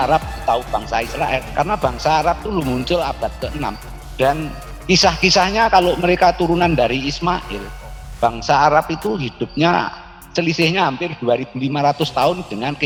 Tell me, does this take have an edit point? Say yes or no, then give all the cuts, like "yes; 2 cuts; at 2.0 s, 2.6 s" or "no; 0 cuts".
no; 0 cuts